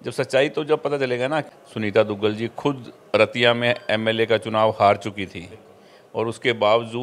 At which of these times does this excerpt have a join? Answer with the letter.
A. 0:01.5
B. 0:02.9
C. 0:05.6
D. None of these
A